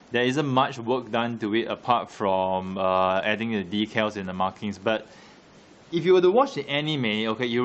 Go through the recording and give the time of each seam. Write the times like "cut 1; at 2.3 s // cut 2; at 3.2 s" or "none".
cut 1; at 2.9 s